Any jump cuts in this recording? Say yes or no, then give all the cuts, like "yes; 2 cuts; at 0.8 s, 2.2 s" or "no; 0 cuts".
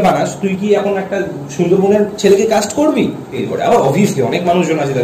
yes; 1 cut; at 3.4 s